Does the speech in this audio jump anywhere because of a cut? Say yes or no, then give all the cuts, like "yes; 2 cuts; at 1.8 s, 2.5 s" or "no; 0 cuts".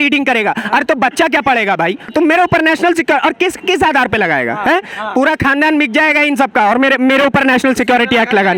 yes; 1 cut; at 2.1 s